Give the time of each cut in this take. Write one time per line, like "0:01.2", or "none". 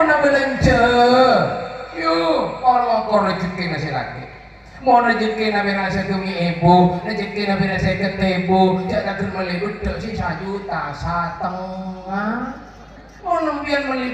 none